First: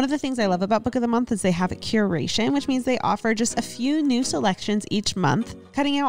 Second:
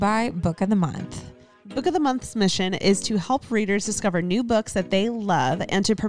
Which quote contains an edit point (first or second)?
second